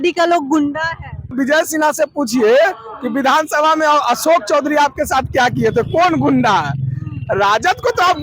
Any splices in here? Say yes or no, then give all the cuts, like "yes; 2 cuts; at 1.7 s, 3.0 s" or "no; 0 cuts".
yes; 1 cut; at 1.3 s